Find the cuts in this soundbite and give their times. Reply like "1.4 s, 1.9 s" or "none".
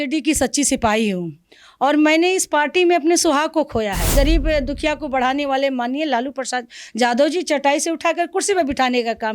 4.1 s